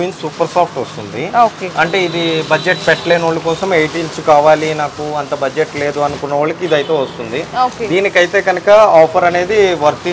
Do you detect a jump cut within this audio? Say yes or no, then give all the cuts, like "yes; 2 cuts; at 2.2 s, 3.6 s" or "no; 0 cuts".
no; 0 cuts